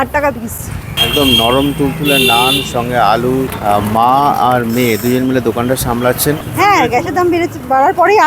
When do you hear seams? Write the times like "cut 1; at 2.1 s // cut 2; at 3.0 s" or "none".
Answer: cut 1; at 0.9 s // cut 2; at 3.5 s // cut 3; at 6.5 s